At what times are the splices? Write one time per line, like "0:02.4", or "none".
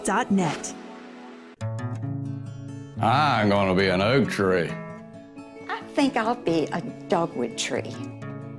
0:01.5